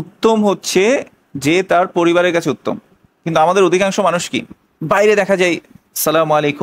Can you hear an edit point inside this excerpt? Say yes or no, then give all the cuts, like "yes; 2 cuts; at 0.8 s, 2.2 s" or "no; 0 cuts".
no; 0 cuts